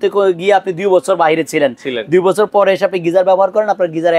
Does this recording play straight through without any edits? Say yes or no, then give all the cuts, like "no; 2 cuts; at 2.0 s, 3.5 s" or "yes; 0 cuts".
yes; 0 cuts